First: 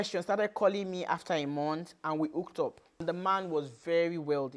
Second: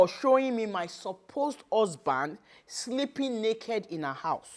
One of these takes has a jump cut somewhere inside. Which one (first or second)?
first